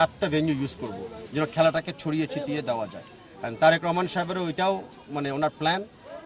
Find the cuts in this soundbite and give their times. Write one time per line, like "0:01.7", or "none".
none